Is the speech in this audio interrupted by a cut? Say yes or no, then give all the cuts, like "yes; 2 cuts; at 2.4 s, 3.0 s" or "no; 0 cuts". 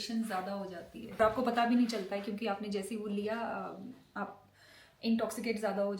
yes; 1 cut; at 1.2 s